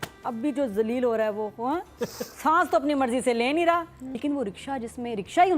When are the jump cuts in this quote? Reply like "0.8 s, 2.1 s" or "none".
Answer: 4.0 s